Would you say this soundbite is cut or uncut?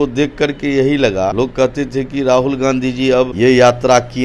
cut